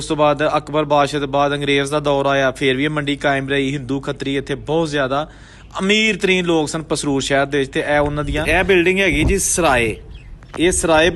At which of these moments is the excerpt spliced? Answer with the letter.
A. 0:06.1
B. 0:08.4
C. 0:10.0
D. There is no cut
B